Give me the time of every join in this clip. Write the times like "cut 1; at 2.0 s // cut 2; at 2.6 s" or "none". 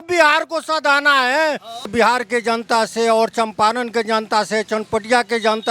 cut 1; at 1.9 s